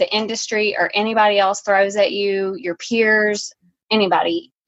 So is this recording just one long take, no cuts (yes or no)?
yes